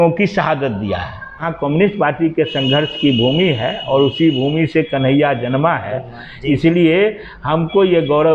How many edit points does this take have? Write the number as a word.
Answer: one